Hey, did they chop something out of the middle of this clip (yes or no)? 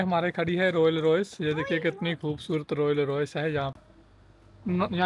yes